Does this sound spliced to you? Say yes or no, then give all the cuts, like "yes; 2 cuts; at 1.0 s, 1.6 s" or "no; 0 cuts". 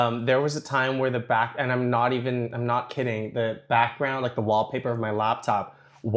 no; 0 cuts